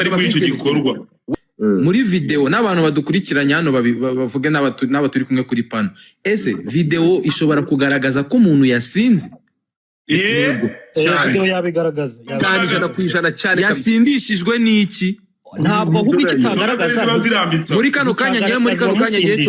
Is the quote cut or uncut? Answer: cut